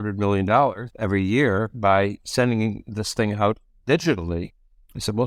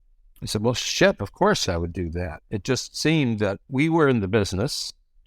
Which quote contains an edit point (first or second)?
second